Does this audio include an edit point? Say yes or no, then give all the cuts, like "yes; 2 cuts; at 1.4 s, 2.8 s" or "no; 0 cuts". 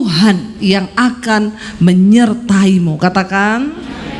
no; 0 cuts